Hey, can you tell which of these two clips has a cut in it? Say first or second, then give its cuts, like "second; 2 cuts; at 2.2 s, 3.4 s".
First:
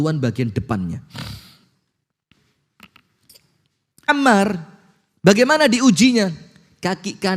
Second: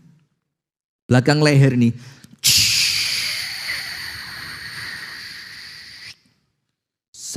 first; 1 cut; at 4.1 s